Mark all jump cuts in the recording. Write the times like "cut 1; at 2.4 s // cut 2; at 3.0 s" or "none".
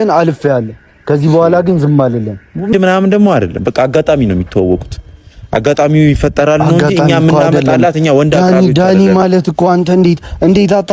cut 1; at 2.7 s

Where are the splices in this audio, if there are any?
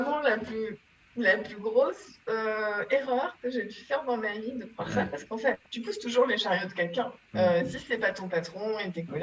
cut 1; at 5.7 s // cut 2; at 7.2 s

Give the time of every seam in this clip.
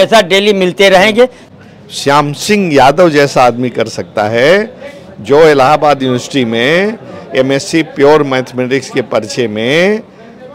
cut 1; at 1.4 s

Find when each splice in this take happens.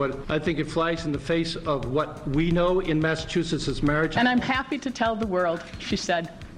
cut 1; at 4.1 s

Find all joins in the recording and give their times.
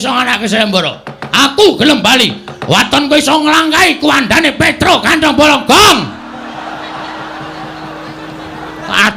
cut 1; at 6.0 s

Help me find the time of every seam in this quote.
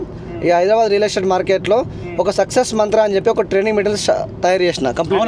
none

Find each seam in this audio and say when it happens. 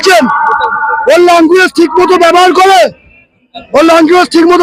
none

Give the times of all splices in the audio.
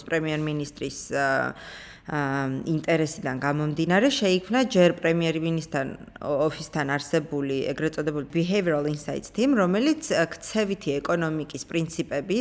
cut 1; at 8.3 s

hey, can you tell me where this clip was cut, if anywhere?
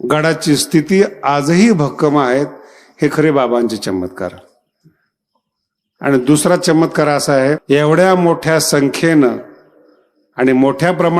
cut 1; at 7.6 s

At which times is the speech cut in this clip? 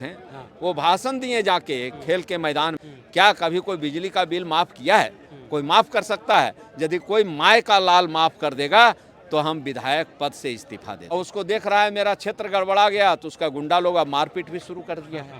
cut 1; at 2.9 s // cut 2; at 11.1 s

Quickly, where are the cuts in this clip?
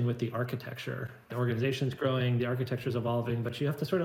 cut 1; at 1.3 s

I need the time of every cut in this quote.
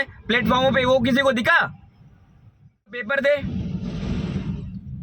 cut 1; at 3.0 s

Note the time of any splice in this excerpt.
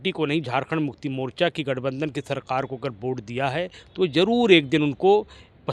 none

